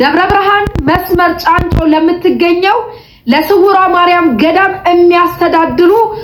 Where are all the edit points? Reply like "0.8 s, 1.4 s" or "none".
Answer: none